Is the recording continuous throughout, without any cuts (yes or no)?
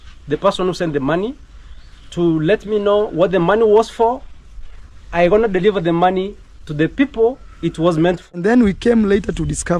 no